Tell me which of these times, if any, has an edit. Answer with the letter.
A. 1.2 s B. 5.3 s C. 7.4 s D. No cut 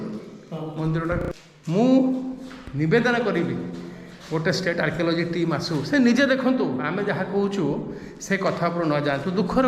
A